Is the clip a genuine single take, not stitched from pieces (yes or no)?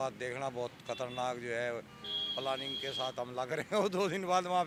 yes